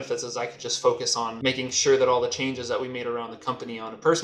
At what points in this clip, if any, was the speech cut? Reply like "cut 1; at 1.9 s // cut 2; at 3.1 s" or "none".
none